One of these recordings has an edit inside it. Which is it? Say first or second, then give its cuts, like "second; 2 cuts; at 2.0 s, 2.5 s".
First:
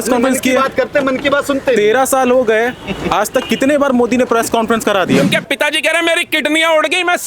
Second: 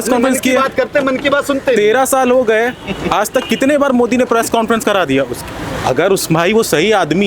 first; 1 cut; at 5.2 s